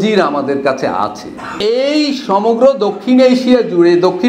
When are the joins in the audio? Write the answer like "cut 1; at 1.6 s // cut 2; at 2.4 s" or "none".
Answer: cut 1; at 1.6 s